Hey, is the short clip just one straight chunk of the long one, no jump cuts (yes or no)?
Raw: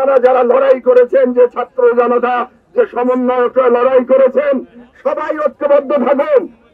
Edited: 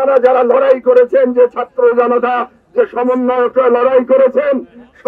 yes